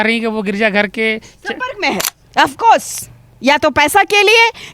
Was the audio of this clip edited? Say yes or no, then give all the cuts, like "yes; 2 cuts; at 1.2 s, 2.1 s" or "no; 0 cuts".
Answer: yes; 1 cut; at 2.2 s